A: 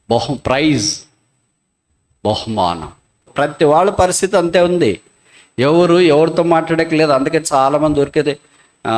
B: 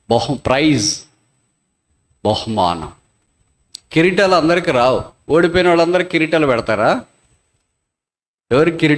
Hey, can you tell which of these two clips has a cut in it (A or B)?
A